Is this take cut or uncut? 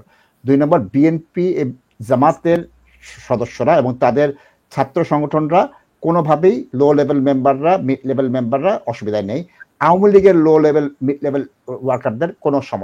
uncut